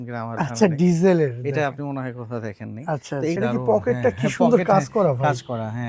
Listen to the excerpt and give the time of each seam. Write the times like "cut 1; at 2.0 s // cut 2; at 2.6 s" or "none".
cut 1; at 3.4 s